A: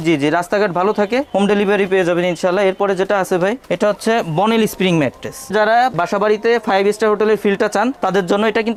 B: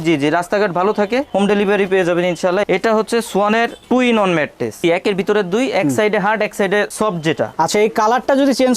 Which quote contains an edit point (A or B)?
B